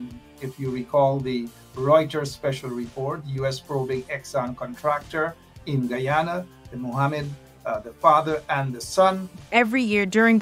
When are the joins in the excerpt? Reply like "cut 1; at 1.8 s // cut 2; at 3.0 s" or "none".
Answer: cut 1; at 9.3 s